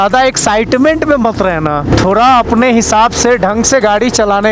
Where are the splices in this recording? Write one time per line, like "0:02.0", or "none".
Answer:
0:01.9